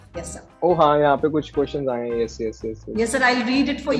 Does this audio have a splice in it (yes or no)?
no